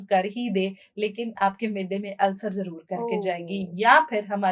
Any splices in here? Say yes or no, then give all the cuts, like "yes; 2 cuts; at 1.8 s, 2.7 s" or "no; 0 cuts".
no; 0 cuts